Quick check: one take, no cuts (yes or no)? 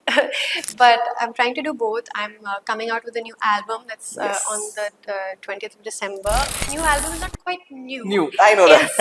no